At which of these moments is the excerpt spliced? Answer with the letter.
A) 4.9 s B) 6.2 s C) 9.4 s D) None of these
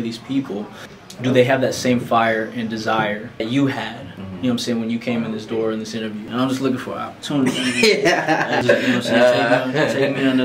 B